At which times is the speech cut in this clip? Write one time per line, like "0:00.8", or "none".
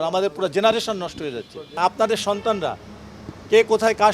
0:01.7